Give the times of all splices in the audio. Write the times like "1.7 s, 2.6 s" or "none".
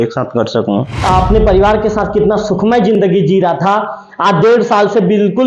0.9 s